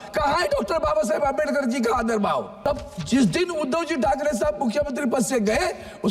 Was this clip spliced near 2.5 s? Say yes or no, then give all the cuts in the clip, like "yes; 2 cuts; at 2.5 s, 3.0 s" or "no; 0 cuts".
yes; 1 cut; at 2.5 s